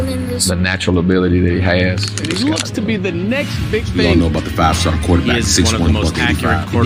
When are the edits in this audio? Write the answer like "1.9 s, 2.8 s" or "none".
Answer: none